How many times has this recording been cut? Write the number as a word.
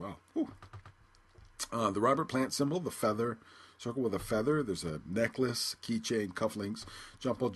zero